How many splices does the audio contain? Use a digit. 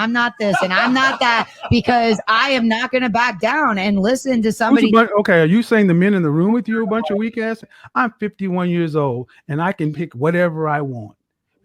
1